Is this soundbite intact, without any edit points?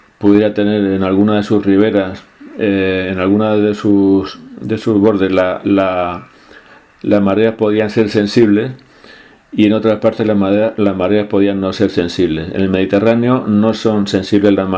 no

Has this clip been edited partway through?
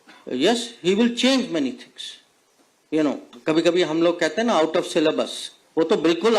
yes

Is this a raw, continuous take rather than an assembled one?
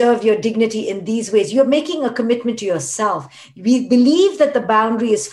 yes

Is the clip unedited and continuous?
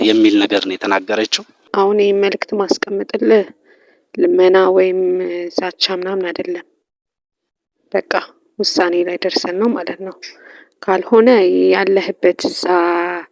no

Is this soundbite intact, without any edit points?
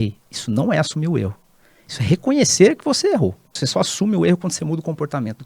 no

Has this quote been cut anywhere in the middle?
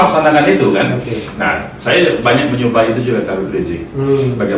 no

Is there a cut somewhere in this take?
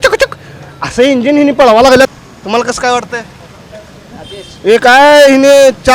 yes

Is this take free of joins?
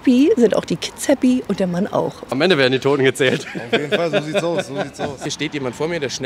no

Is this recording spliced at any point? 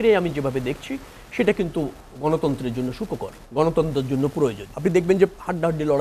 yes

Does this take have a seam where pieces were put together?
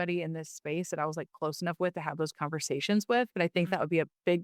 no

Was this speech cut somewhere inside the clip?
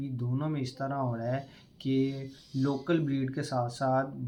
no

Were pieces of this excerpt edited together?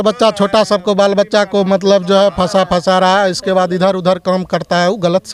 no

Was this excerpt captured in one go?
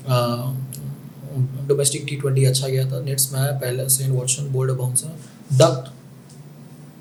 yes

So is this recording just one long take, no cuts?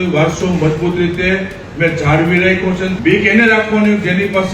no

